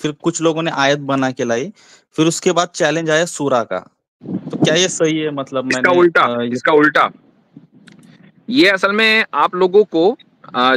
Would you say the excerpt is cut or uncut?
uncut